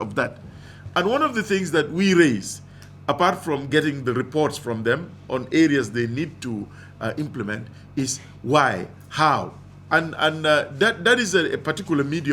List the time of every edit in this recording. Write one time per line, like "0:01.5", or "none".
none